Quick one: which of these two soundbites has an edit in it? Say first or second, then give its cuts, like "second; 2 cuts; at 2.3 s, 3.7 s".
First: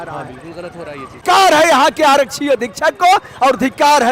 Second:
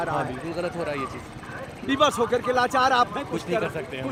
first; 1 cut; at 1.2 s